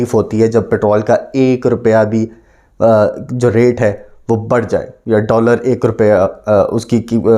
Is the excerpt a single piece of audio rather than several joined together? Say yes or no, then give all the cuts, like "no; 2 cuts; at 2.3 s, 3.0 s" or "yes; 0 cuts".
yes; 0 cuts